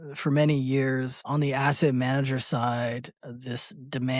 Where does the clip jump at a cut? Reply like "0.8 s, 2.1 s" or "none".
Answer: 1.2 s